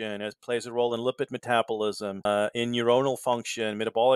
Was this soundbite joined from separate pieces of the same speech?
no; 0 cuts

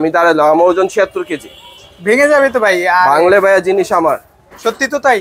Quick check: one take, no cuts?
yes; 0 cuts

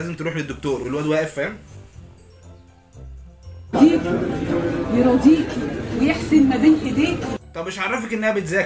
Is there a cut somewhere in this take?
yes; 1 cut; at 3.7 s

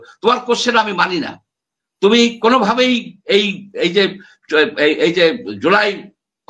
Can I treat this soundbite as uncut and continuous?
yes; 0 cuts

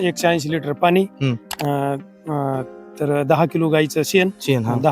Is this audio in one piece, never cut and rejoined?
yes; 0 cuts

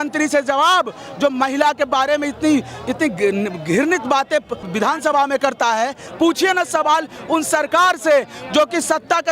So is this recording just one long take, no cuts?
no; 2 cuts; at 4.6 s, 6.0 s

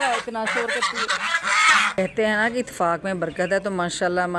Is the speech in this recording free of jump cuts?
no; 1 cut; at 2.0 s

